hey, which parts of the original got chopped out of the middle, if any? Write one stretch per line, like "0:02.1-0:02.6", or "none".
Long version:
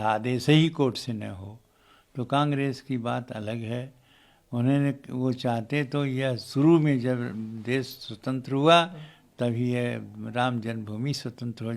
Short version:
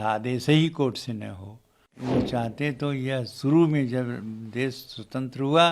0:01.9-0:05.1